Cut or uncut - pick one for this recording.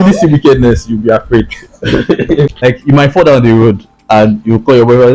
cut